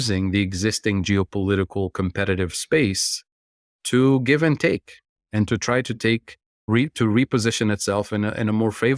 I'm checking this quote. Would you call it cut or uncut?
uncut